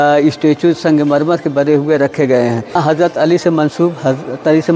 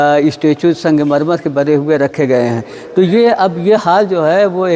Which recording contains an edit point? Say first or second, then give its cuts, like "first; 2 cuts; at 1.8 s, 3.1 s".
first; 1 cut; at 2.8 s